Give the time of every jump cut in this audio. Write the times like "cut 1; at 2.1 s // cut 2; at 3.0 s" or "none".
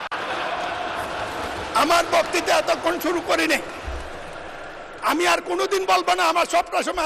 none